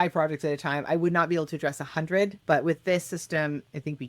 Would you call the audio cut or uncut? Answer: cut